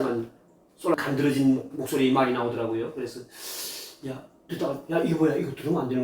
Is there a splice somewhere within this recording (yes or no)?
yes